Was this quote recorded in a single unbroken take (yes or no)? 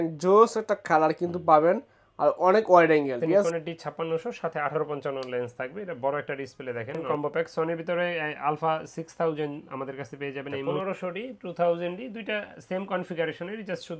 no